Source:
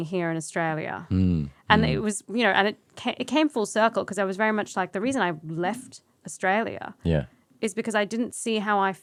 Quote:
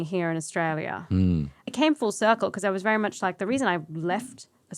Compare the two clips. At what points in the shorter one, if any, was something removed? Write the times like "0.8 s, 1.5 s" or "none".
1.6 s